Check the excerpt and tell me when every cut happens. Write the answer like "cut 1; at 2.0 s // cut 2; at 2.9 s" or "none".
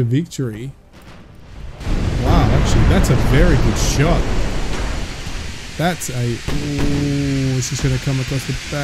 cut 1; at 1.7 s